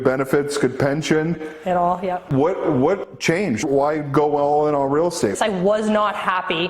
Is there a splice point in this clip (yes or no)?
yes